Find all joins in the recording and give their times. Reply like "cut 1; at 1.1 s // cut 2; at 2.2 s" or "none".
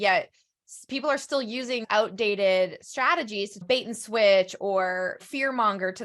cut 1; at 1.8 s // cut 2; at 3.6 s // cut 3; at 5.2 s